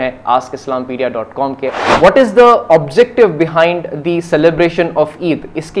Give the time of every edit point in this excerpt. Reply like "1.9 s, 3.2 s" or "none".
1.7 s